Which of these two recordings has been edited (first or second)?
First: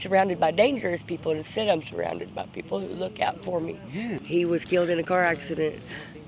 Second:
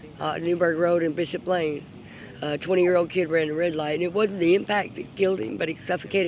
first